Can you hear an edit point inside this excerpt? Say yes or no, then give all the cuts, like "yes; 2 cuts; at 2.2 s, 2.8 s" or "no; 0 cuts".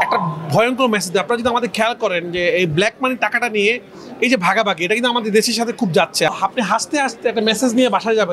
yes; 1 cut; at 6.3 s